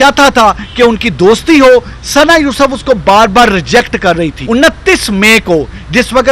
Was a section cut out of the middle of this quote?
yes; 1 cut; at 4.4 s

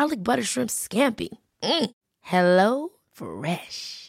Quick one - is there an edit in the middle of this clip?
no; 0 cuts

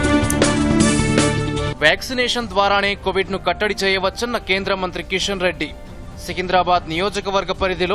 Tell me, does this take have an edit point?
yes; 1 cut; at 1.7 s

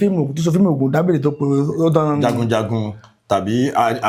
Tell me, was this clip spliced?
no; 0 cuts

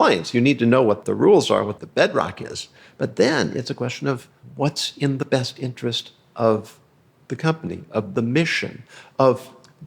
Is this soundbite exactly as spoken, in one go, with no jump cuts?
no; 3 cuts; at 1.0 s, 1.8 s, 4.4 s

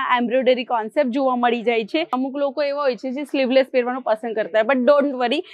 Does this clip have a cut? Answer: yes; 1 cut; at 2.1 s

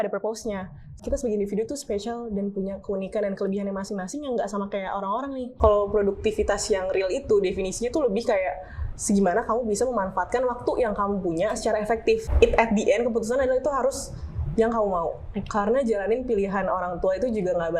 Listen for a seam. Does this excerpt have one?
yes; 3 cuts; at 0.9 s, 5.5 s, 12.3 s

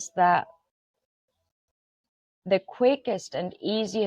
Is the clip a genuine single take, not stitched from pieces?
yes; 0 cuts

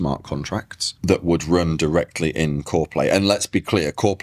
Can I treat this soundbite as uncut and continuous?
yes; 0 cuts

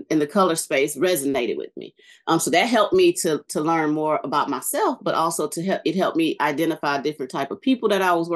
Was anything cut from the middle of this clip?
no; 0 cuts

